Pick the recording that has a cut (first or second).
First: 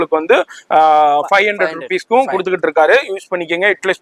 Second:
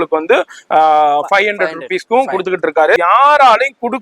second